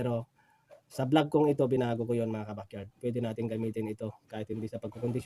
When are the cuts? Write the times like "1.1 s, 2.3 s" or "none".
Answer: none

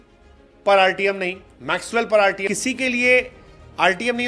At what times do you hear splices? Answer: 2.5 s

